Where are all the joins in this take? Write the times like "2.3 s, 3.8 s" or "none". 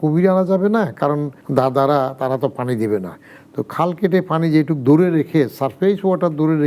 1.4 s